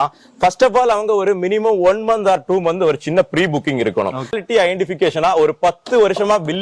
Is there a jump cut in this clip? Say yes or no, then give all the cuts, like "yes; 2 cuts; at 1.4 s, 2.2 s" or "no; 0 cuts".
yes; 1 cut; at 4.4 s